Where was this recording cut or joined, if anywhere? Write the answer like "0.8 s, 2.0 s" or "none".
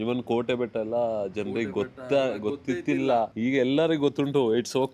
3.3 s